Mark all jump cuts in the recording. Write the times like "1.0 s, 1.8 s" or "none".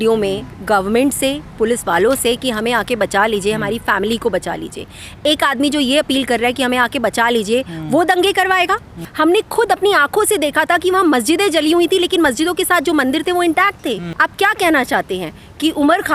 9.0 s, 14.1 s

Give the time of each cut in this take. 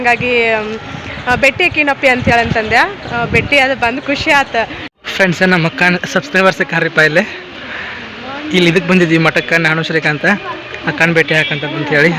4.8 s

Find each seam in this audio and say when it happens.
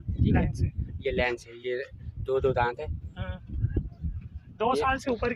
none

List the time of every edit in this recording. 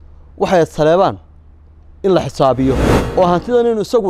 2.9 s

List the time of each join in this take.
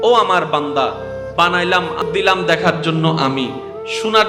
2.0 s

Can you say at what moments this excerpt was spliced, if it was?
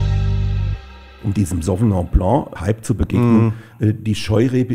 1.0 s

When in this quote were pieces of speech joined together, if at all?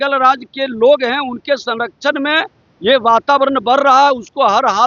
none

